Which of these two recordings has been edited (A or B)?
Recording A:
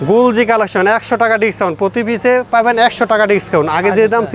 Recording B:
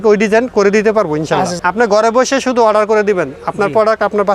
B